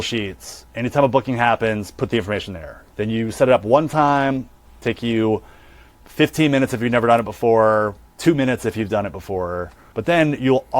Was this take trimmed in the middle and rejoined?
yes; 2 cuts; at 6.0 s, 9.8 s

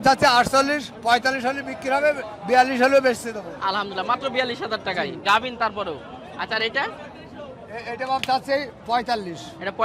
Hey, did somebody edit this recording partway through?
no; 0 cuts

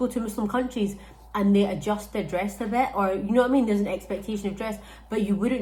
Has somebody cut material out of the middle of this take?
no; 0 cuts

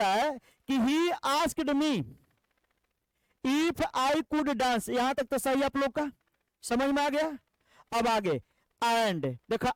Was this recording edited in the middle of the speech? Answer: no; 0 cuts

